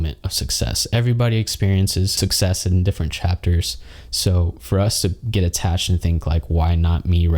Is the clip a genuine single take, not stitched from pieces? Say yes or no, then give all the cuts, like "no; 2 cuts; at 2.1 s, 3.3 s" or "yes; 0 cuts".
no; 1 cut; at 2.1 s